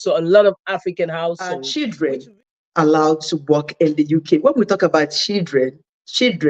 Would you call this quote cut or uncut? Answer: cut